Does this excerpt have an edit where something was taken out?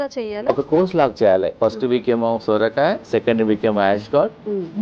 yes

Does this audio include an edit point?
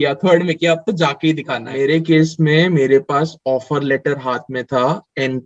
yes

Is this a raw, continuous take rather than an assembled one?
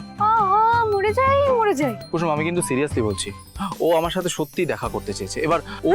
no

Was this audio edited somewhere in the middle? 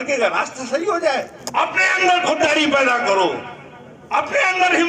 yes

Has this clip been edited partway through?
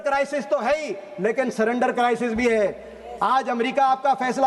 no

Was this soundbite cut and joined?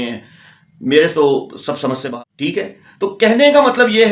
yes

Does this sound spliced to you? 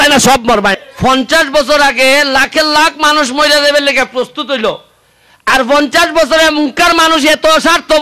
no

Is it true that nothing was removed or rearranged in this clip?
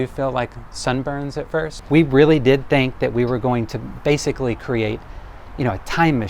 no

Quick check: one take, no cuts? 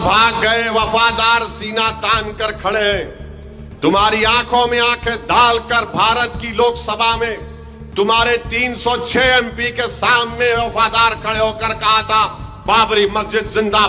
yes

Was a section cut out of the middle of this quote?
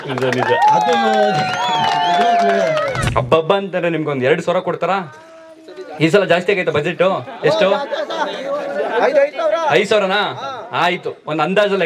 yes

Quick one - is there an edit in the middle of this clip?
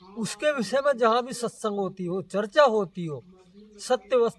no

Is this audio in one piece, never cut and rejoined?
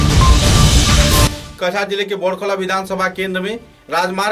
yes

